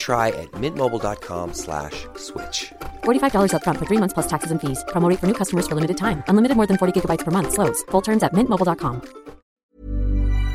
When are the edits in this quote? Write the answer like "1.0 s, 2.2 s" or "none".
9.6 s